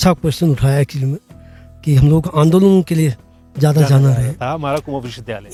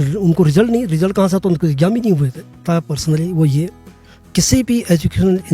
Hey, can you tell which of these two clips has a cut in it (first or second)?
second